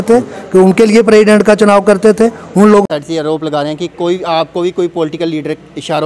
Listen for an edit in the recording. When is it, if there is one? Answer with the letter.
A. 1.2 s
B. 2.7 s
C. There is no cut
B